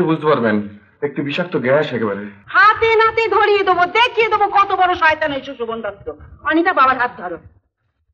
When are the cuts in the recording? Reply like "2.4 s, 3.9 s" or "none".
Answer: 2.4 s